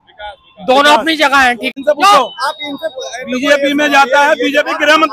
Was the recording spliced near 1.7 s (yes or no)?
yes